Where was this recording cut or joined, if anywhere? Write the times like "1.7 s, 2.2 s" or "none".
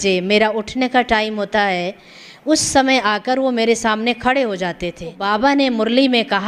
5.2 s